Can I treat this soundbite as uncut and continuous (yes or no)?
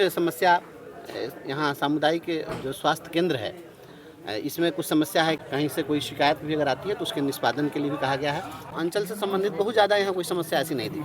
no